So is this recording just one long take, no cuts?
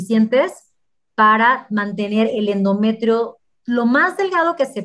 yes; 0 cuts

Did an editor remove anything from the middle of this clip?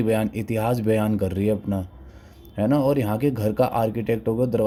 no; 0 cuts

